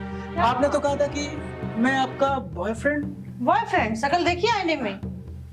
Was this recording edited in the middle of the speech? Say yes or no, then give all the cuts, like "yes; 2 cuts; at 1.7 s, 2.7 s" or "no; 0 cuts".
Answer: no; 0 cuts